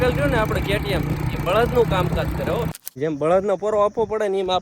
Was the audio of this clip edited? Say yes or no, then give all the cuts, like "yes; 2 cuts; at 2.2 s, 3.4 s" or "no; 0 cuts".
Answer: yes; 1 cut; at 2.7 s